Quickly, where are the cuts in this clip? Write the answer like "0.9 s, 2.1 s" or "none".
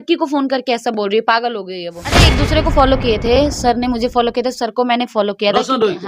2.3 s